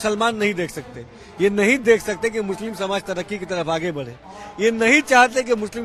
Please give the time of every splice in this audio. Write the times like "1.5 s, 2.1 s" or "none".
none